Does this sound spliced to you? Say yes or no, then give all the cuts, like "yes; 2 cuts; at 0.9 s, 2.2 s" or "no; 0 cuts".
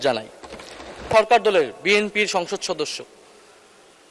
yes; 1 cut; at 1.1 s